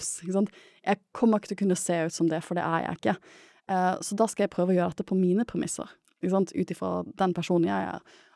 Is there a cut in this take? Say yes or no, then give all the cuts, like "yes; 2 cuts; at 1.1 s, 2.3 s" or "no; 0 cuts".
no; 0 cuts